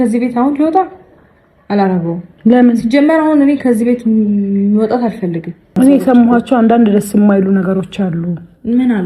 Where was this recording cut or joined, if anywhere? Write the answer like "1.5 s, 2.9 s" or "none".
5.7 s